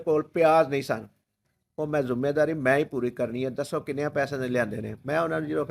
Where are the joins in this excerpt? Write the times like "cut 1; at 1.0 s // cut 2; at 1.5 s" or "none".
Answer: cut 1; at 1.3 s